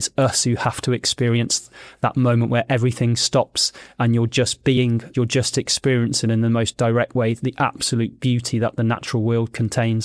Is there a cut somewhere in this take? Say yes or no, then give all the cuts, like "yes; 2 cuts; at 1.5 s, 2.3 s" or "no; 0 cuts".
yes; 1 cut; at 5.0 s